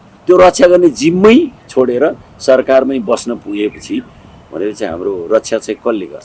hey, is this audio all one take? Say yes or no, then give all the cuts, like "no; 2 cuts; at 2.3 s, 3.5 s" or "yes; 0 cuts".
yes; 0 cuts